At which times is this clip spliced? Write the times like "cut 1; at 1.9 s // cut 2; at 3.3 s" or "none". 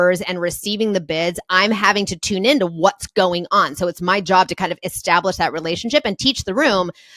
none